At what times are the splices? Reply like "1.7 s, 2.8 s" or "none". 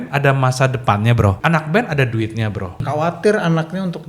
1.4 s, 2.8 s